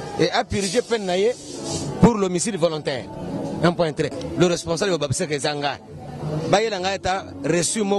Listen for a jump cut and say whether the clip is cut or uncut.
cut